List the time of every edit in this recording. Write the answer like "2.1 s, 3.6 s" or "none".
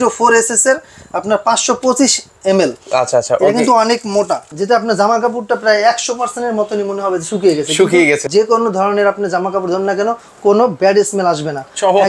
4.5 s, 8.2 s

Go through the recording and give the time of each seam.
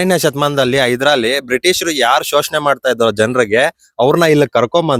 none

